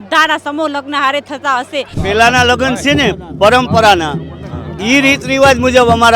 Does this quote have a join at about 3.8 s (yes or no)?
no